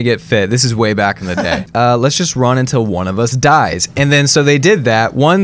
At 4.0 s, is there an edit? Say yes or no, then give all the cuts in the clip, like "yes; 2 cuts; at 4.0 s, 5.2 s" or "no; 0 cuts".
no; 1 cut; at 1.3 s